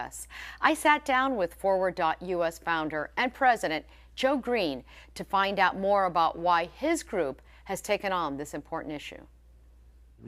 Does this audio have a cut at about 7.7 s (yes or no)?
yes